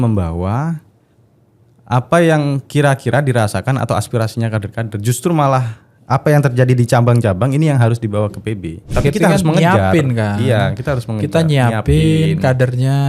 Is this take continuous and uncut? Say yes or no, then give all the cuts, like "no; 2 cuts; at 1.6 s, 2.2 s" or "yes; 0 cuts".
no; 1 cut; at 8.9 s